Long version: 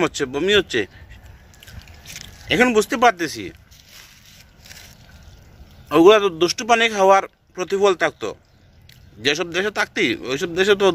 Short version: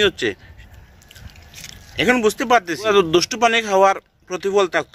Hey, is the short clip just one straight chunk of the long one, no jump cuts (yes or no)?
no